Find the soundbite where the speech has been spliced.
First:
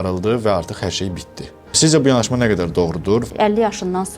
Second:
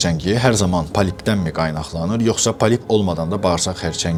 first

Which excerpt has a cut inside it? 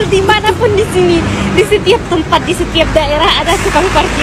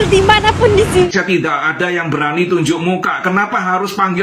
second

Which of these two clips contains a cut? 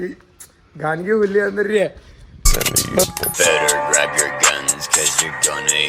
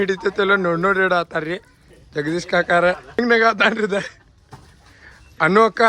second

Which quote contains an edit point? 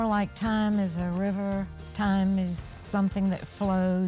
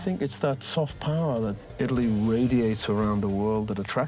first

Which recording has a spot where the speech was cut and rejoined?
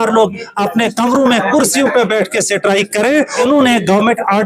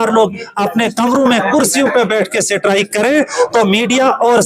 first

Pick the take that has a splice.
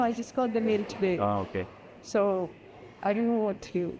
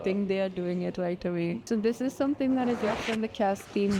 second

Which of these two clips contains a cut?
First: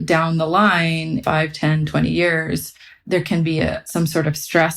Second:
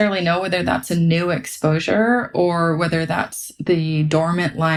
first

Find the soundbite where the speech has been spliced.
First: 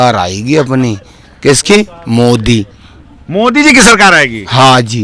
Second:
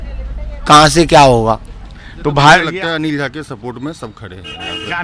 second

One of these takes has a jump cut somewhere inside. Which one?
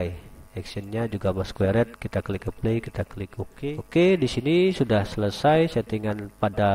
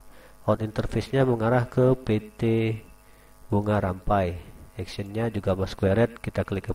first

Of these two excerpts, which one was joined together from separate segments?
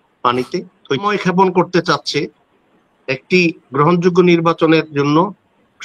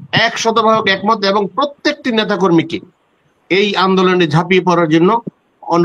first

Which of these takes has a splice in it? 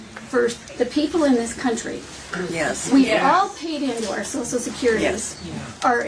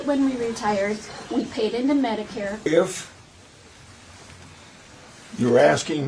second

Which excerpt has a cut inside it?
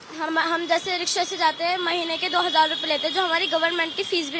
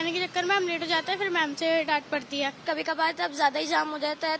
second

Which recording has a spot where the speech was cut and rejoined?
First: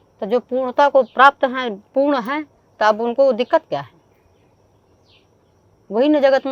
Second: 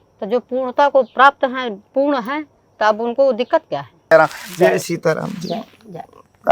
second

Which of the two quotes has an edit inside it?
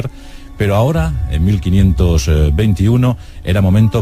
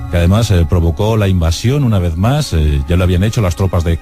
second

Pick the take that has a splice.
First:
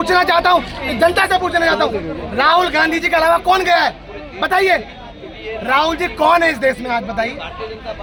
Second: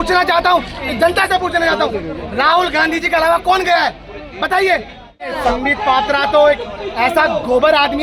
second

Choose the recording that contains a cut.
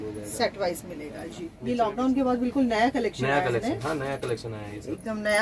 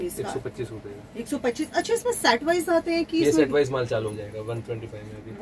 first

